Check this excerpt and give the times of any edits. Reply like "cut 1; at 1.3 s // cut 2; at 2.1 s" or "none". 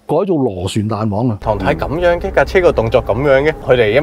cut 1; at 1.4 s